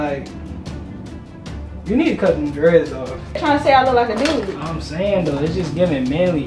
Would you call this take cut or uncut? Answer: cut